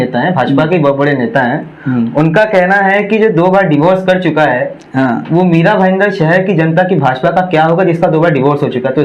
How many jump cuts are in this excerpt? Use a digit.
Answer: 0